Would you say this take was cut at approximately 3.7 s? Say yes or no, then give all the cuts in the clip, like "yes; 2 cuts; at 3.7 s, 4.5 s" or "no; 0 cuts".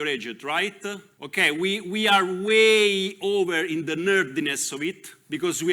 no; 1 cut; at 1.1 s